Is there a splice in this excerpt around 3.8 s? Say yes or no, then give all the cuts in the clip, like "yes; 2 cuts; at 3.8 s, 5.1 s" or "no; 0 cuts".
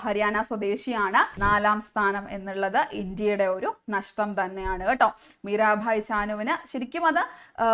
no; 1 cut; at 1.3 s